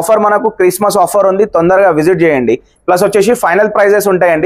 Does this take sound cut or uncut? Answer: uncut